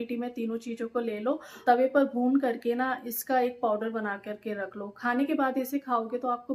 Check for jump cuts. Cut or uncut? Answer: uncut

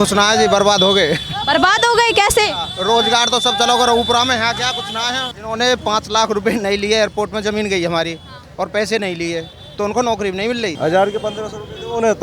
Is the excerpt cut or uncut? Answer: cut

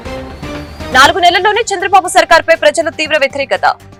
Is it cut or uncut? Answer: uncut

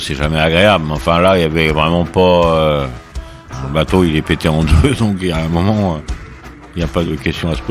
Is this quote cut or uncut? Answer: cut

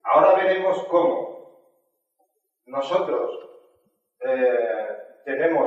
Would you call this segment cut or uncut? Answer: cut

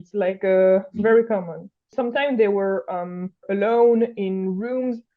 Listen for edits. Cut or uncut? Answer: cut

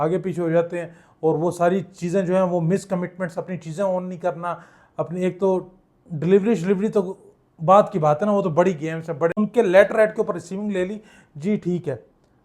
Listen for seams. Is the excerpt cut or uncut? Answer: cut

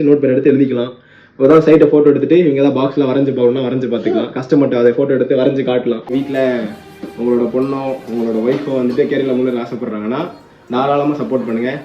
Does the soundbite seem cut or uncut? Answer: cut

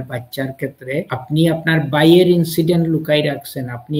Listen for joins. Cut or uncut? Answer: cut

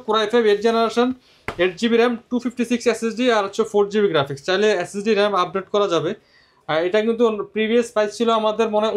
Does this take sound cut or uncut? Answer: uncut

